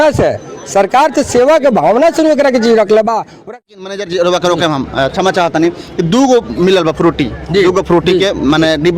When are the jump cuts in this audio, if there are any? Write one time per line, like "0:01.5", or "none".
0:03.4